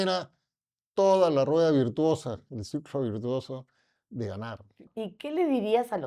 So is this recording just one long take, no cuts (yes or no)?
no